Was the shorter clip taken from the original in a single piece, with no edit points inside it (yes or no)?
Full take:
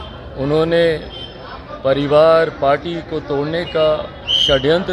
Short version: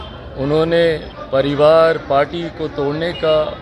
no